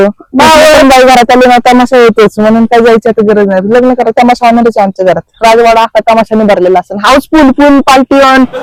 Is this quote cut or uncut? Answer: uncut